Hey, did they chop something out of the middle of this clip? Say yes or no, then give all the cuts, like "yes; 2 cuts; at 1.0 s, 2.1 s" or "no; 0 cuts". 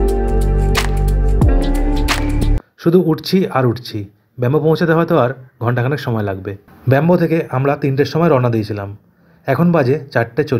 yes; 2 cuts; at 2.6 s, 6.6 s